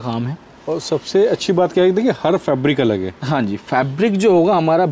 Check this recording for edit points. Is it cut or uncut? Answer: uncut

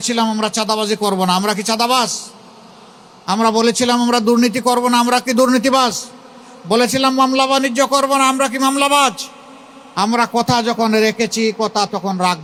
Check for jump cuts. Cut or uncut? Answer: uncut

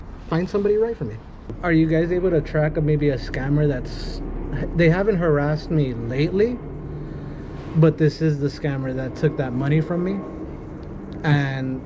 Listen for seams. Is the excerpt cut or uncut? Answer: cut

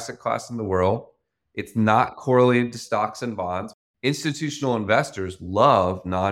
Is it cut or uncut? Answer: cut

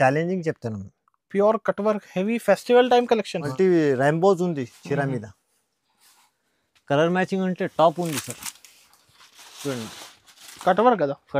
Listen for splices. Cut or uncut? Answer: cut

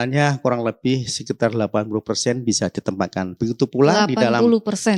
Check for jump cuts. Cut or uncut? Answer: uncut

